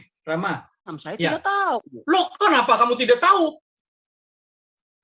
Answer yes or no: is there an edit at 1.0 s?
yes